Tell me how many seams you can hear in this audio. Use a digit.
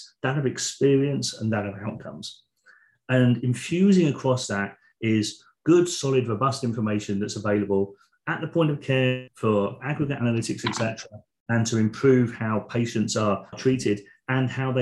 1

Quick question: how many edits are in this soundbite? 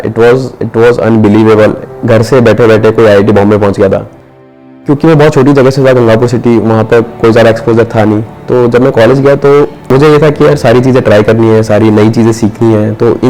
3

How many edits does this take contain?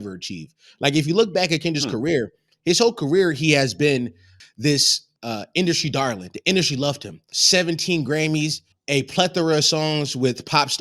3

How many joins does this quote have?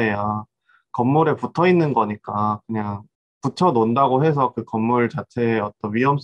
1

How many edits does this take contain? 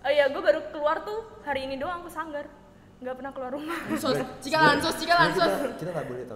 0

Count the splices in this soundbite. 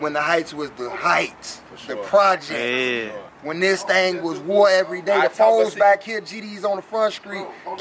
0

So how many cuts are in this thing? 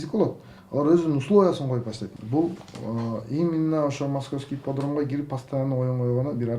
1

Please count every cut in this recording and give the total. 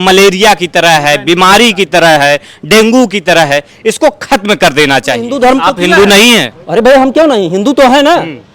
1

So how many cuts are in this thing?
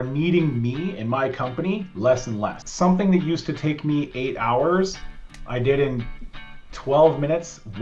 1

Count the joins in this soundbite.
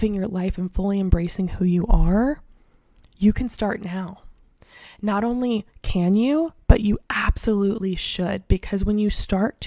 0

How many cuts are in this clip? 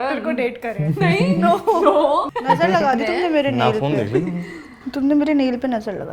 1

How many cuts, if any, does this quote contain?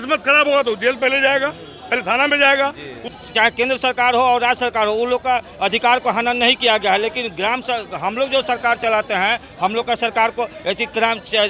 1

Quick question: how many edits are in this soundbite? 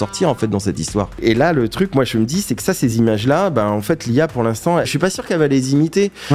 2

